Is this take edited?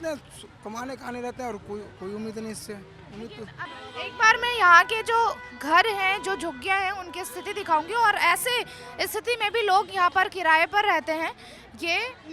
yes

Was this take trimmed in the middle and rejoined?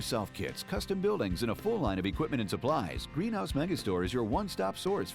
no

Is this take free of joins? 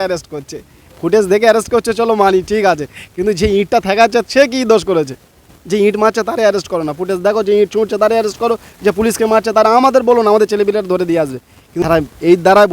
no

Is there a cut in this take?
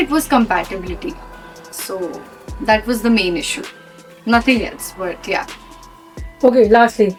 no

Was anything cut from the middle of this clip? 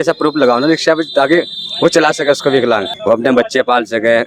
yes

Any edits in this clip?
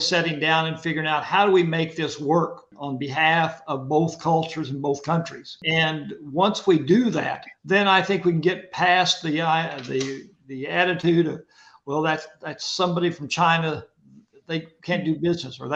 yes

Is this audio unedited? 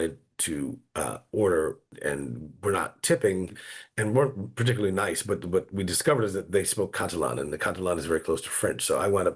no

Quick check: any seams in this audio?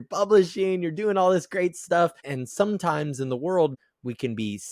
yes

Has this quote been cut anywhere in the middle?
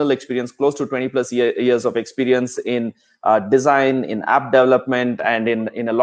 no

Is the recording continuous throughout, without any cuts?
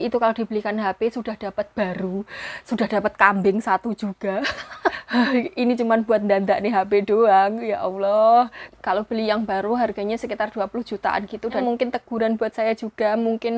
no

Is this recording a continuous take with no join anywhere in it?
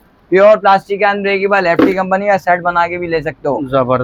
yes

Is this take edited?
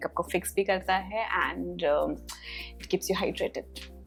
no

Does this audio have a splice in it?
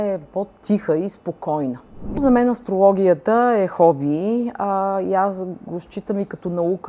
yes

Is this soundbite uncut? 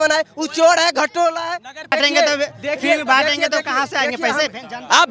no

